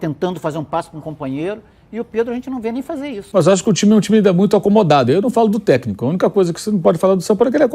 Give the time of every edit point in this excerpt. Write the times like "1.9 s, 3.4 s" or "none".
3.2 s